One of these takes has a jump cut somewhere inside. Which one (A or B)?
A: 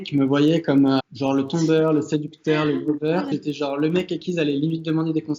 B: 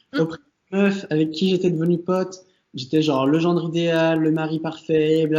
A